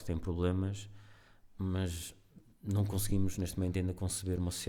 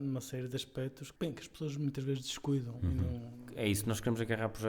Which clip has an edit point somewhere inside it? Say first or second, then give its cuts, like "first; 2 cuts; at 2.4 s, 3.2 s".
second; 2 cuts; at 1.0 s, 3.4 s